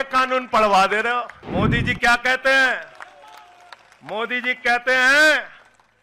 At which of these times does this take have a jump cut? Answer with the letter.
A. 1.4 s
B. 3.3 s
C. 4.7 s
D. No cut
A